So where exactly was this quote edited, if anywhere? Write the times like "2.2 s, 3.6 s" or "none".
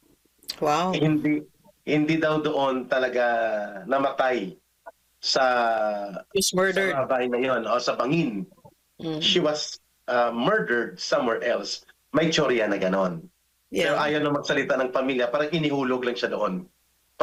none